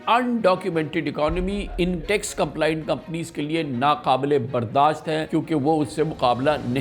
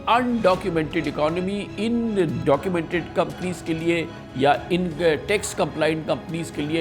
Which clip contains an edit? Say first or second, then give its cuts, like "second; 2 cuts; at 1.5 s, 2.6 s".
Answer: first; 2 cuts; at 1.9 s, 5.2 s